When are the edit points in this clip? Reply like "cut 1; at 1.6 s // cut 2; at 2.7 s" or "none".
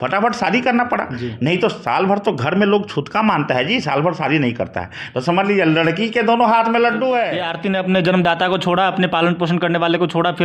cut 1; at 7.5 s